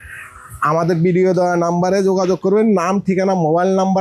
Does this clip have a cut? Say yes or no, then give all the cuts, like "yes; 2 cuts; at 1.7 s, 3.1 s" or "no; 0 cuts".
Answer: no; 0 cuts